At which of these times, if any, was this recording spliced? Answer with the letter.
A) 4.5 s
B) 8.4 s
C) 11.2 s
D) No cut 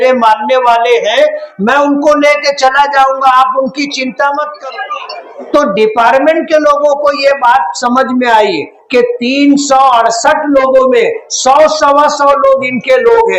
A